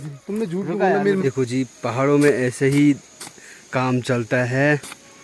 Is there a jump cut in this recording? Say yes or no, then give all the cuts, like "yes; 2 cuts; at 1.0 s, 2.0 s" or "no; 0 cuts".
yes; 1 cut; at 1.2 s